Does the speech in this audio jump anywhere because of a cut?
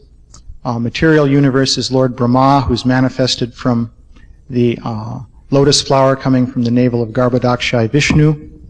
yes; 1 cut; at 3.1 s

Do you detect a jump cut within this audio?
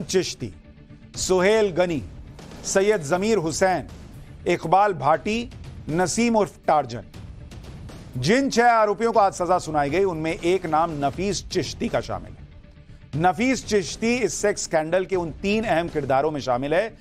yes; 1 cut; at 1.6 s

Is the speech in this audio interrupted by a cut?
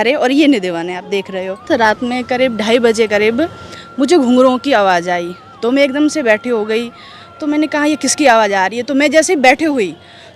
yes; 1 cut; at 1.6 s

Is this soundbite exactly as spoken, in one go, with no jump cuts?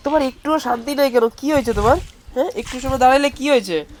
yes; 0 cuts

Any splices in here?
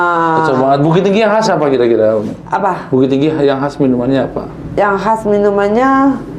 no; 0 cuts

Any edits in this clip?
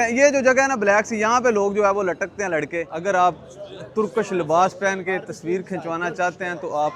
yes; 1 cut; at 2.9 s

